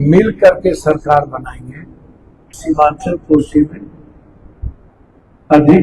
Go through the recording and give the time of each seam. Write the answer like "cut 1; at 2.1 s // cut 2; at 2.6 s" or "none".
cut 1; at 2.6 s